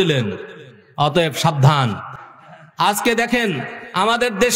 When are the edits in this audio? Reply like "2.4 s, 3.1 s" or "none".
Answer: none